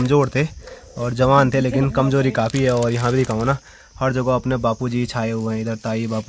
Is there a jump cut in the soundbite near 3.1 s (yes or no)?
no